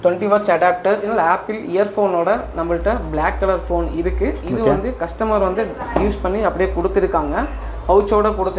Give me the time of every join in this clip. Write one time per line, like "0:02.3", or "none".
none